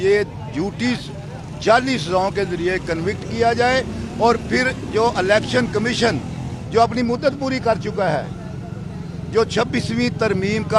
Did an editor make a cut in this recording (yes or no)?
no